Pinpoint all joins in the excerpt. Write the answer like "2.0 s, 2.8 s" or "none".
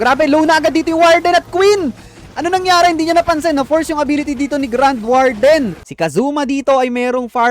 5.8 s